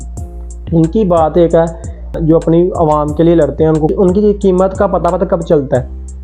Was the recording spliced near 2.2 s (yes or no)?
yes